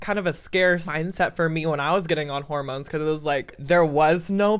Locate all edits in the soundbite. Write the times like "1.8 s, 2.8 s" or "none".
0.9 s, 3.6 s